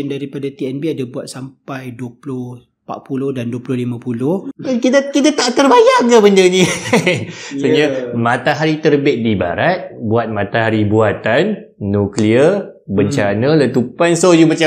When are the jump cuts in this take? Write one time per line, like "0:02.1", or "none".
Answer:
0:04.5